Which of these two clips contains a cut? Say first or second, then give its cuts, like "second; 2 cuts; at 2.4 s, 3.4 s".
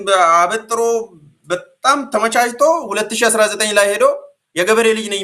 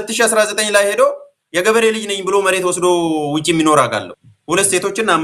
second; 1 cut; at 4.1 s